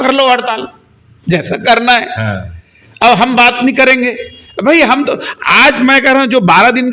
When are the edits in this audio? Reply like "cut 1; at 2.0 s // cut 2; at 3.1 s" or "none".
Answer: none